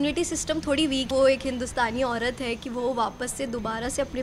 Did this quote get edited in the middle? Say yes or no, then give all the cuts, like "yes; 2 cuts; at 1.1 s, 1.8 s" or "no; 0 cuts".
yes; 1 cut; at 1.1 s